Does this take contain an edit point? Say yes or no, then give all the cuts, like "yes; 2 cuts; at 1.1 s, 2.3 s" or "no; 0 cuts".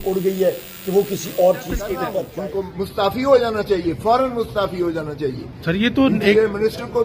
yes; 1 cut; at 2.1 s